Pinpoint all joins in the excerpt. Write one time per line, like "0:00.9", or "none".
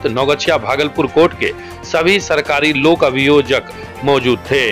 none